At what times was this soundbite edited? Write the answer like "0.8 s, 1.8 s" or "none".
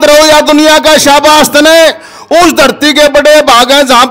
none